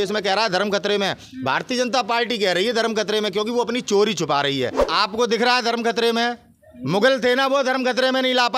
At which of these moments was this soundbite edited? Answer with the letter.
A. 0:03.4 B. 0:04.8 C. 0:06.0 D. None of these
B